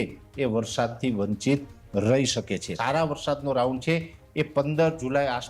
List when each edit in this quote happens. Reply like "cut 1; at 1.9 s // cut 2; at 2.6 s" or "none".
cut 1; at 2.8 s